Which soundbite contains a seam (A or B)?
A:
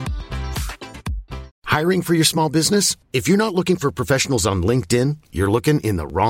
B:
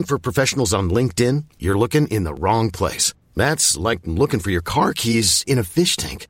A